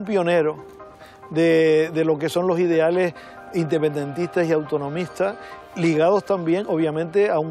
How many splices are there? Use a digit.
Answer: 0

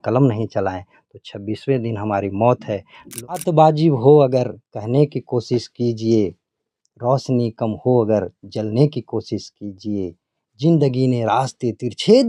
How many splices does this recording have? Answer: 1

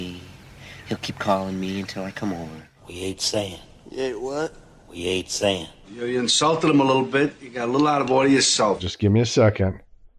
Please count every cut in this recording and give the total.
0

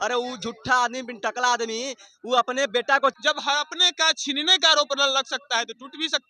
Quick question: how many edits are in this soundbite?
1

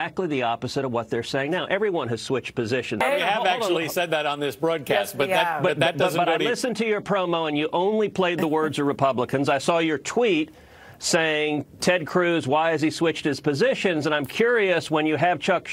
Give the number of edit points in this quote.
1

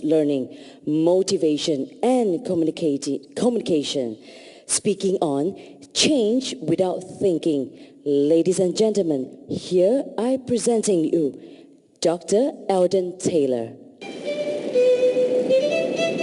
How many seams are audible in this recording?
1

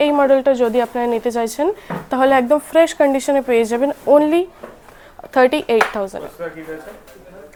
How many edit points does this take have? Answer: 0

